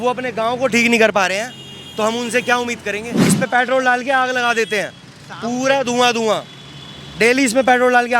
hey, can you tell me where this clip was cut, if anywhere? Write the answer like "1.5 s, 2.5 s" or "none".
3.2 s